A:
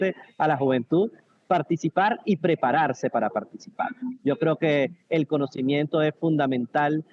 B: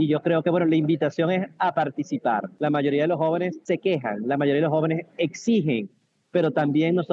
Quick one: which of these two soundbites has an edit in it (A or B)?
B